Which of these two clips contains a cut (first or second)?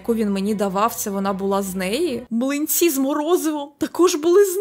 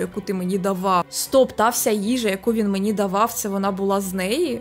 second